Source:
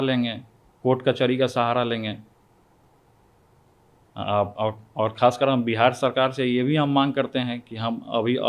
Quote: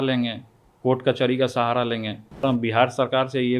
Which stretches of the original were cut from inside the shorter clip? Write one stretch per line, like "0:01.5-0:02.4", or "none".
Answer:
0:02.4-0:05.5